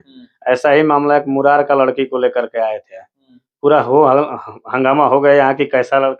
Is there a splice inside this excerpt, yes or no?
no